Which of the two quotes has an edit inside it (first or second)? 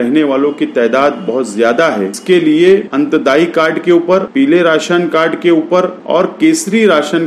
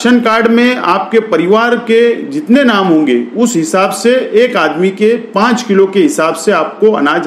first